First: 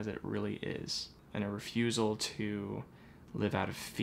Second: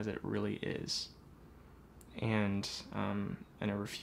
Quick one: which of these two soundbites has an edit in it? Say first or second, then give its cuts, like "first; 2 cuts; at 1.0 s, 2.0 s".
first; 1 cut; at 1.2 s